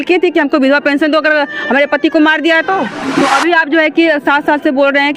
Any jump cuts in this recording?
yes; 1 cut; at 3.0 s

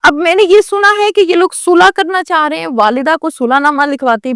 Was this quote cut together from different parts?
no; 0 cuts

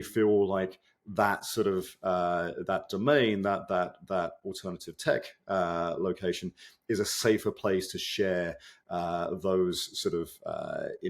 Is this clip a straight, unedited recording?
yes; 0 cuts

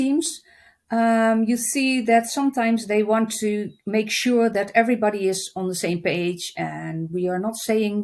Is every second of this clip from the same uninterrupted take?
yes; 0 cuts

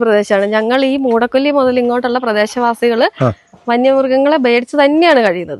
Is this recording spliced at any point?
no; 0 cuts

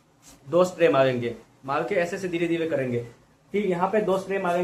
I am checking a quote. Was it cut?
no; 0 cuts

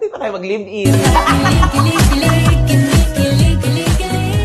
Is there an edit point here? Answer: no; 0 cuts

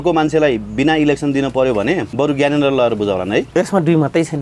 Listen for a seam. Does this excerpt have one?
yes; 2 cuts; at 2.1 s, 3.5 s

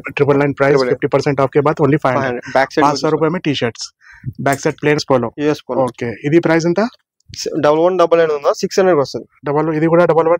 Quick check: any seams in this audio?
yes; 1 cut; at 5.0 s

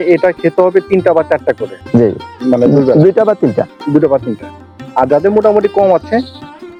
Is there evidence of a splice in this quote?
no; 0 cuts

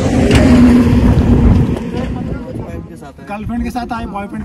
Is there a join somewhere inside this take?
yes; 1 cut; at 2.7 s

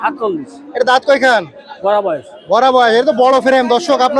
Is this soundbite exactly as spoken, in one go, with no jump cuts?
yes; 0 cuts

